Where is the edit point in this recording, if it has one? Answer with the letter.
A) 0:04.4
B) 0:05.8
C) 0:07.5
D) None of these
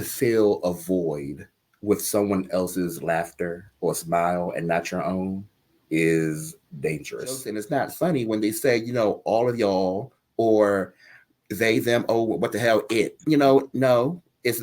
C